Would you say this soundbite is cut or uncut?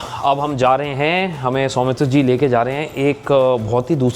uncut